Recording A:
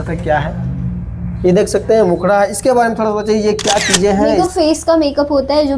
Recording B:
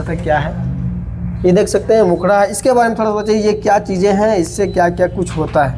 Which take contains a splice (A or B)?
A